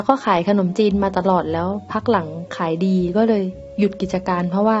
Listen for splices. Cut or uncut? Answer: uncut